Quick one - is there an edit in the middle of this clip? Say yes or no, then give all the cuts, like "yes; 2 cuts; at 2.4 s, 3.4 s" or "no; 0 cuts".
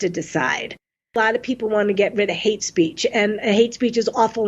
yes; 1 cut; at 1.2 s